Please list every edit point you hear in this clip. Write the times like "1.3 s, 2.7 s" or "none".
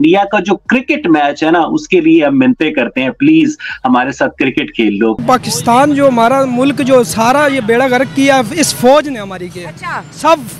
5.2 s